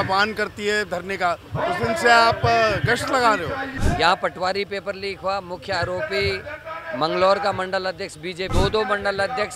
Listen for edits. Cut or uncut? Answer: cut